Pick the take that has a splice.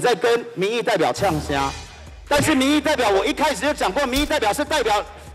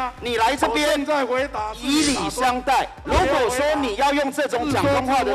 second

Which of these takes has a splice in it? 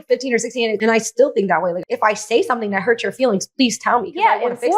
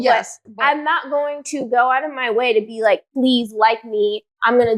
first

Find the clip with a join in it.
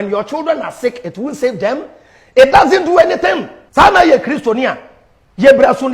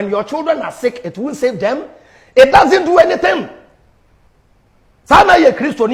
first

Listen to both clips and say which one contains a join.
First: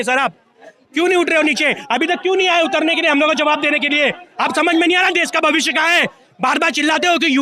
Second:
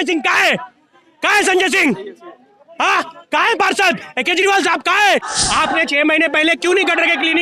second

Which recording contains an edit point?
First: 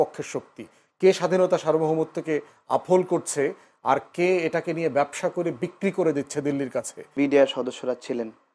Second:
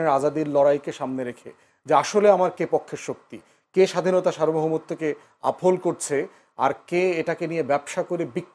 first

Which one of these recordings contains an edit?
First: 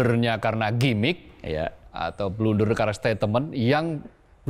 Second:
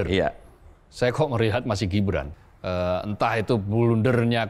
second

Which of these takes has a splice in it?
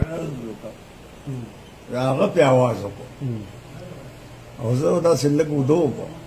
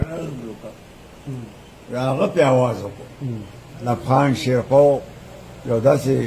second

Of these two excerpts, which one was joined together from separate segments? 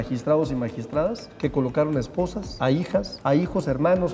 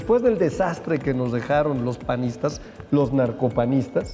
first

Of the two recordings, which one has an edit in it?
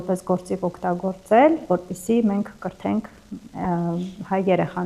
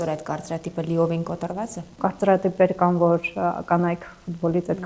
second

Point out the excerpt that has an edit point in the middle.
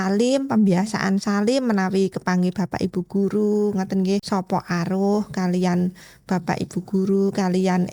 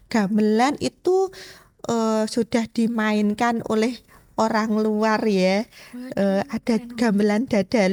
first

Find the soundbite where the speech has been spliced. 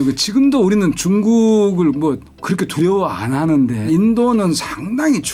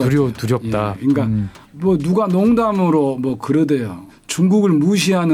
first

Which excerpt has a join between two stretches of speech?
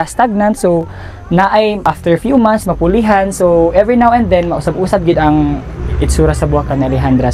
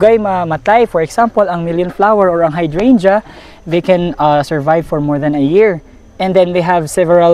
first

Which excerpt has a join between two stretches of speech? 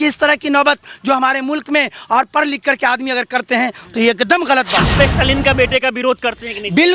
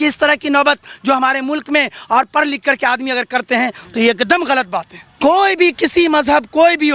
first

